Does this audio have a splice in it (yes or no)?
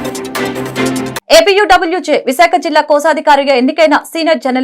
yes